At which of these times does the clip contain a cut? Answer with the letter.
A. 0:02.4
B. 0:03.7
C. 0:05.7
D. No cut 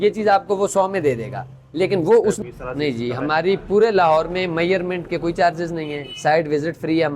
A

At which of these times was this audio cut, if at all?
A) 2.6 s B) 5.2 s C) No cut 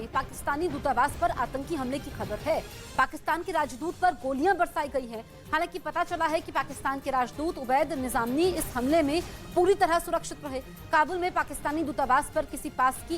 C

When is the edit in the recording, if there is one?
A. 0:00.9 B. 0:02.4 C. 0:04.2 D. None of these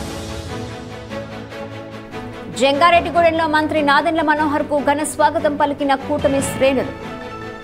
B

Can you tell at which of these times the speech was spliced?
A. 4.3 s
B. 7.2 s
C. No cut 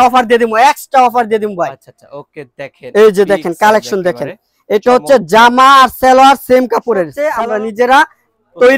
B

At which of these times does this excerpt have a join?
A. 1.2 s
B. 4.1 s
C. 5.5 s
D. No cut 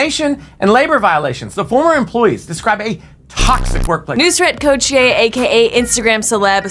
B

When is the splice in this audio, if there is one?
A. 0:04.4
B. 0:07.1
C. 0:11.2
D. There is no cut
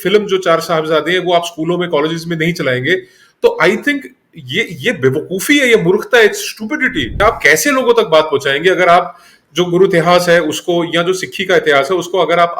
B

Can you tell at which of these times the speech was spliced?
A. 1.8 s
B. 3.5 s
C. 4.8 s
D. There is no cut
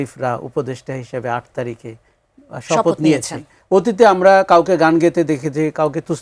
B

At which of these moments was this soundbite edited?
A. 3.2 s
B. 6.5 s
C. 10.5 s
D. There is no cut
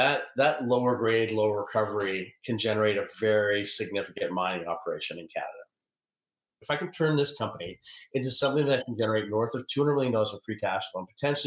B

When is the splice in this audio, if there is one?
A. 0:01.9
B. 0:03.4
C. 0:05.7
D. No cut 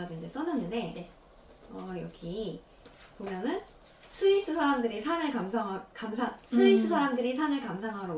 D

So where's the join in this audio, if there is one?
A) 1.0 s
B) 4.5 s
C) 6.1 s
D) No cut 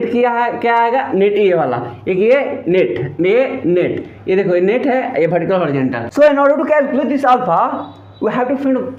C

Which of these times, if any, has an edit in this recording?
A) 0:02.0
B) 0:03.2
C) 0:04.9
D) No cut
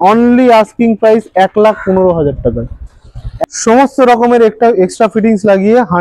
B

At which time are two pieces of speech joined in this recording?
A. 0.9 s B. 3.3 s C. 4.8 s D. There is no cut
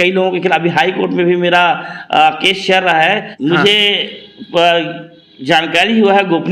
B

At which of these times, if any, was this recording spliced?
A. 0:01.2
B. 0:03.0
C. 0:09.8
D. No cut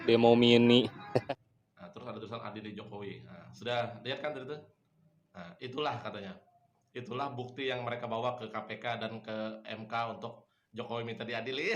A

